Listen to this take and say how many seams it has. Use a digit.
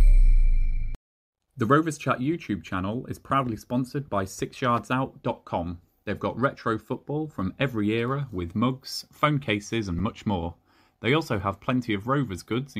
1